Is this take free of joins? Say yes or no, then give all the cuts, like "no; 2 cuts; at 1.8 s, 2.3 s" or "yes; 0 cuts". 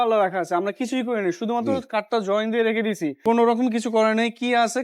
no; 1 cut; at 3.2 s